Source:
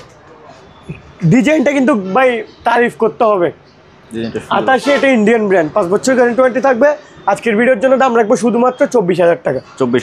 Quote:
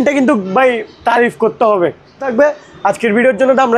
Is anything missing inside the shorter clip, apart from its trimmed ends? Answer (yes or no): yes